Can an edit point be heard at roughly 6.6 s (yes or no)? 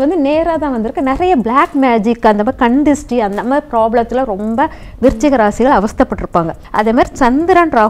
yes